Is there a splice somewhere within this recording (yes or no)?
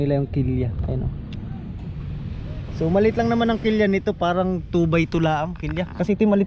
no